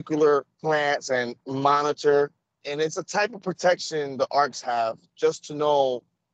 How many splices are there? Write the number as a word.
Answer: two